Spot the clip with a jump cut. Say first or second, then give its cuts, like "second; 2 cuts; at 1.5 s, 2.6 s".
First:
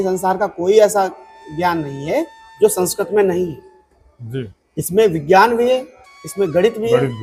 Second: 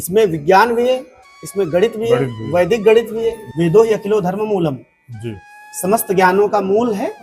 second; 1 cut; at 3.4 s